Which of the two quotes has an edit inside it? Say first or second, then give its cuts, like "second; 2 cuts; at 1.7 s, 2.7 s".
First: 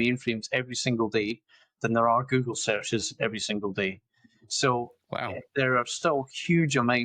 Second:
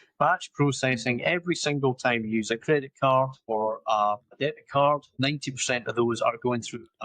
second; 3 cuts; at 3.4 s, 4.3 s, 5.1 s